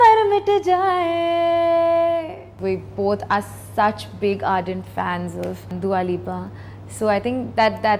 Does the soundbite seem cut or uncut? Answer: cut